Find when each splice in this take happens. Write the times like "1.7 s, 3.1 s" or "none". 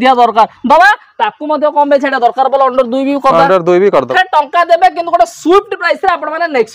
4.1 s